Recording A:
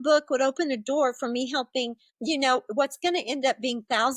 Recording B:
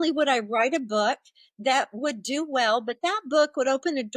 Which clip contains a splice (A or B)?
A